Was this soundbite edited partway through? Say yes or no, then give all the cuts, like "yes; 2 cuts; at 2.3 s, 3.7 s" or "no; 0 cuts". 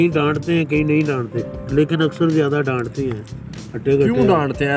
no; 0 cuts